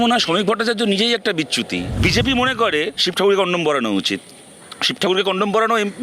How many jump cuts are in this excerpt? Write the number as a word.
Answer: one